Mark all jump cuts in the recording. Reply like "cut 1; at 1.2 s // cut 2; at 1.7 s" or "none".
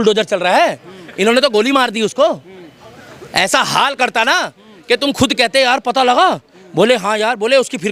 none